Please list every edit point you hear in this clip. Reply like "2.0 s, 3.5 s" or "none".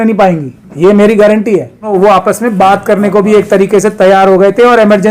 1.9 s